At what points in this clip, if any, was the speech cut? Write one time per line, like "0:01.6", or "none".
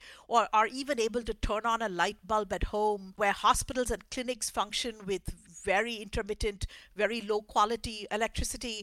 0:03.1
0:05.4
0:08.0